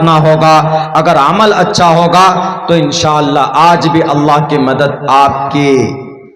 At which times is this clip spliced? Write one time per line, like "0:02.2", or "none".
none

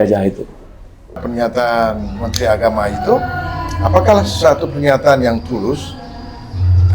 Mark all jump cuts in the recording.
0:01.3

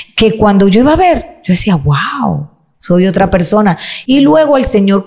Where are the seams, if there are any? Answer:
none

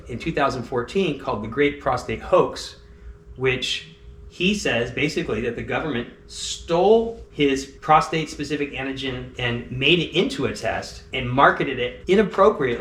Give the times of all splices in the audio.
none

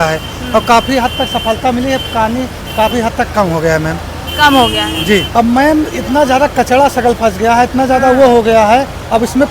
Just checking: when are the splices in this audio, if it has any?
0:05.3

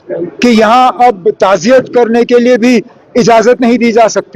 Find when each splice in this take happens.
none

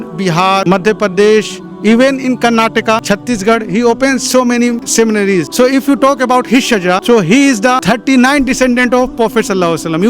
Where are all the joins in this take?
none

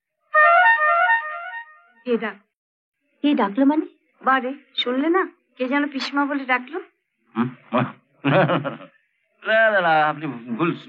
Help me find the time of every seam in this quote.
none

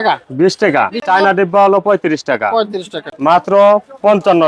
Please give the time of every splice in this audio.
0:01.0
0:03.1

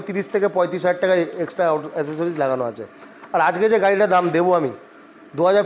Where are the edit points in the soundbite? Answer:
none

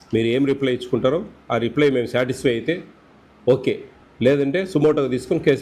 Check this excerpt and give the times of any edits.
none

